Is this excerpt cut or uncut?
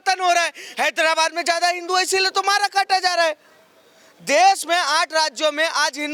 uncut